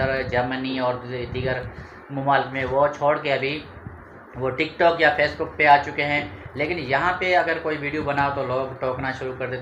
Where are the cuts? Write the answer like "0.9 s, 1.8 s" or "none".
none